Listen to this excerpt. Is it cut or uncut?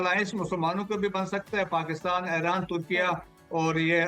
uncut